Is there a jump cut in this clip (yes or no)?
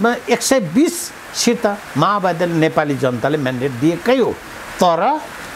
no